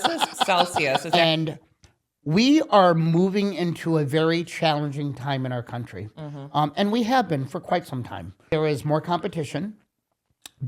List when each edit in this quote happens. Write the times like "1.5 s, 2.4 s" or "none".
1.1 s, 8.4 s